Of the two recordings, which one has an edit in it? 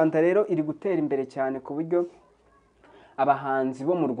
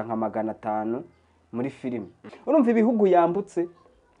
second; 1 cut; at 2.3 s

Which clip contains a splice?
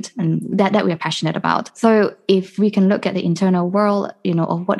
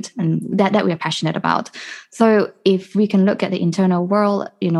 first; 1 cut; at 1.7 s

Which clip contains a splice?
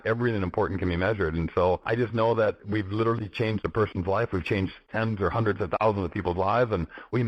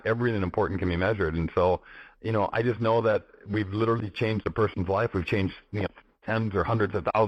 first; 3 cuts; at 1.8 s, 2.6 s, 4.8 s

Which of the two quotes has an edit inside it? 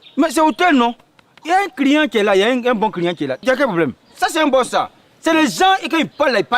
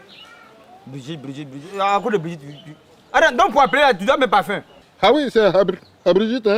first; 1 cut; at 4.0 s

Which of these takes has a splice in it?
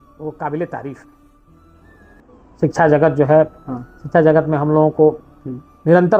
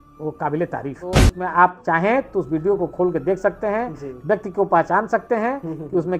second; 1 cut; at 1.3 s

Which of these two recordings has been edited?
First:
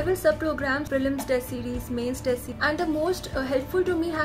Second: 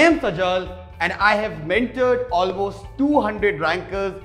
first; 2 cuts; at 0.9 s, 2.5 s

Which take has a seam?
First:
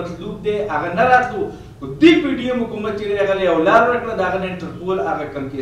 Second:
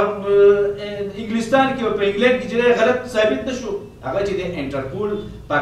second; 1 cut; at 3.9 s

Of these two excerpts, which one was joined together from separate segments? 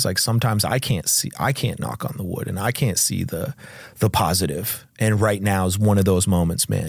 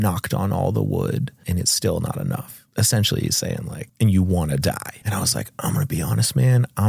second; 4 cuts; at 1.4 s, 2.6 s, 3.8 s, 4.9 s

